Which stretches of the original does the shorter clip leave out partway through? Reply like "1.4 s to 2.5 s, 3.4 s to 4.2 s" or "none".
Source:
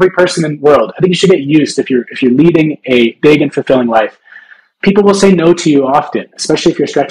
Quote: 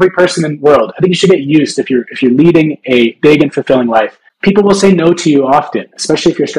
4.2 s to 4.6 s